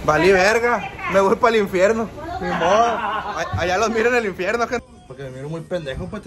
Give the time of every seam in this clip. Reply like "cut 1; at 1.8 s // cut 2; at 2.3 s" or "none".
cut 1; at 4.8 s